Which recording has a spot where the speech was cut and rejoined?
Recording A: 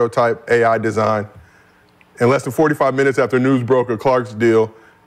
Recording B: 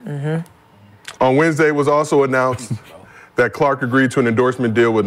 B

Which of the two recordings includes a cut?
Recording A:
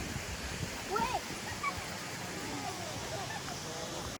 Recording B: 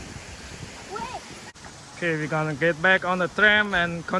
B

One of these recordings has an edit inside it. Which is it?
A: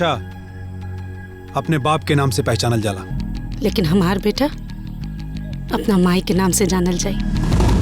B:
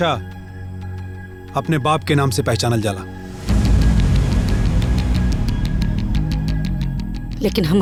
A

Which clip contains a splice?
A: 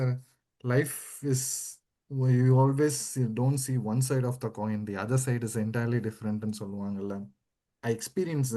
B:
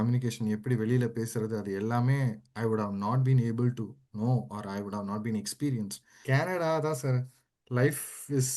B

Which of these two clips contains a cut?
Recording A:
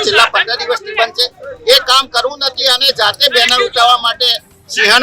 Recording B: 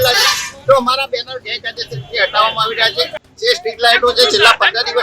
B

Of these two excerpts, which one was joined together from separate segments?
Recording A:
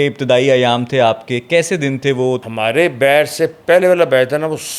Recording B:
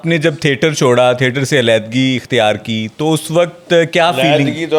A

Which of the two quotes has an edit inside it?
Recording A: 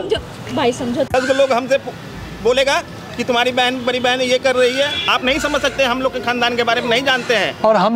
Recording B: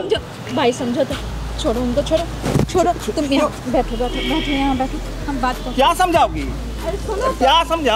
A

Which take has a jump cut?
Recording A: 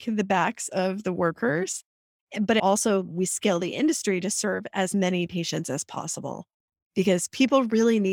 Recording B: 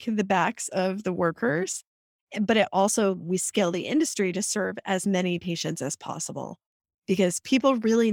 A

